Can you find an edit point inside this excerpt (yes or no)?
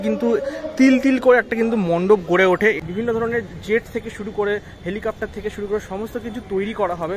yes